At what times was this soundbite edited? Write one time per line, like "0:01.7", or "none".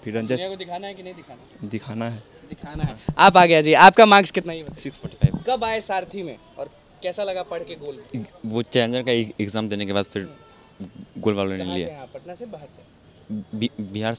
none